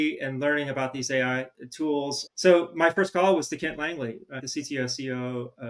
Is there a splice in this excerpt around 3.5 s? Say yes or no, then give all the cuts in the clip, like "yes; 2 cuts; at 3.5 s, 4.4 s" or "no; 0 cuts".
no; 1 cut; at 2.2 s